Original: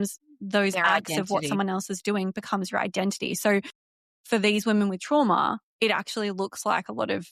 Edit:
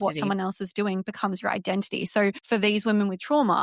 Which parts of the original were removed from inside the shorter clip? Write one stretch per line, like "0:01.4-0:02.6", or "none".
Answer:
0:03.7-0:04.2